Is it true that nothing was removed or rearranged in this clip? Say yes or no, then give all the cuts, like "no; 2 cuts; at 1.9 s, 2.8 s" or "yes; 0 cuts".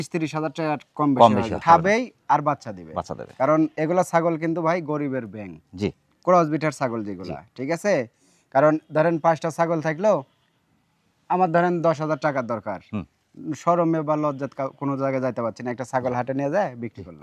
no; 1 cut; at 1.6 s